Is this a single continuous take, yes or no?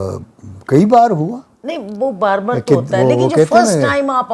yes